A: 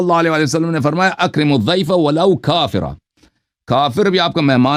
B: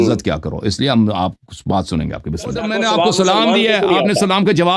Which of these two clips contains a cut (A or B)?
B